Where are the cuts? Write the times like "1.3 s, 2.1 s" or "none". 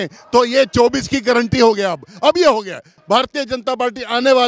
2.9 s